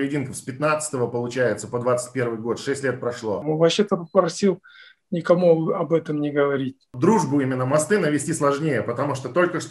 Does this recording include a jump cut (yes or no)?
yes